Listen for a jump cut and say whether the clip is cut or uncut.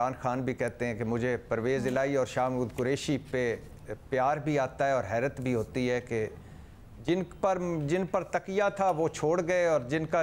uncut